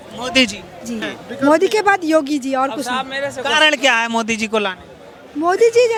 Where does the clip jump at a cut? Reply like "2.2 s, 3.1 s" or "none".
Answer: none